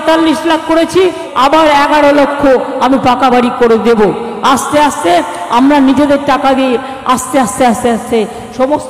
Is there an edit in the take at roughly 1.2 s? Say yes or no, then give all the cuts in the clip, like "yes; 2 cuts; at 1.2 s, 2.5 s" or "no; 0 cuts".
yes; 1 cut; at 1.2 s